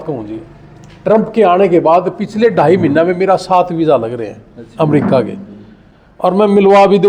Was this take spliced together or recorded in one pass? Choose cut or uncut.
uncut